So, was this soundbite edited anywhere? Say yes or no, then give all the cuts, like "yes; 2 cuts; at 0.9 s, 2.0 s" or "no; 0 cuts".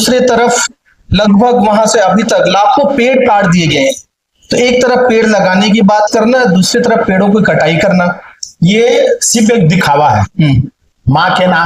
no; 0 cuts